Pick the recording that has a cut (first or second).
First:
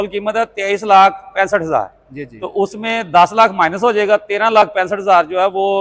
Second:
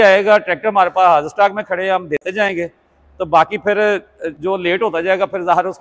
second